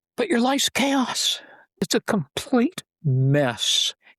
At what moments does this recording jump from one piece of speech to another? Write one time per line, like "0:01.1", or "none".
0:01.9

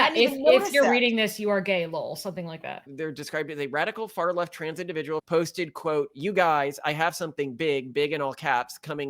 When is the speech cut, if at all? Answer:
0:02.9
0:05.2

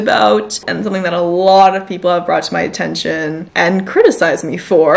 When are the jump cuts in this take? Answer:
0:03.4

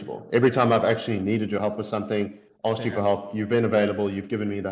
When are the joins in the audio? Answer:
none

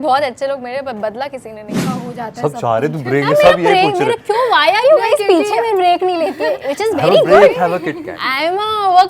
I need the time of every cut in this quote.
0:01.8

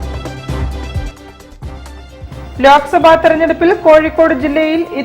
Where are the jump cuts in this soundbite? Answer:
0:02.2

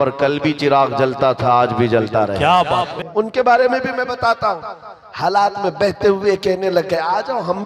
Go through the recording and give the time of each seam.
0:02.9

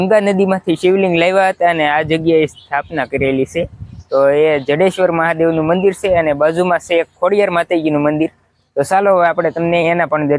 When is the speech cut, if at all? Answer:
none

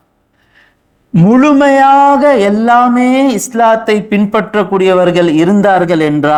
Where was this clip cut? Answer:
none

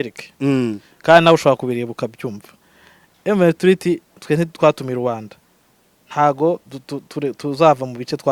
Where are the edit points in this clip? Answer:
none

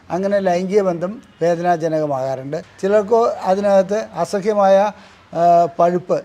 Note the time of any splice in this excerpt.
0:02.6

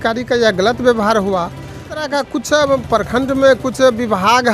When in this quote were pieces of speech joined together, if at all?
0:02.0

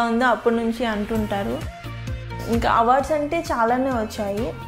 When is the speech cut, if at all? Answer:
0:02.2

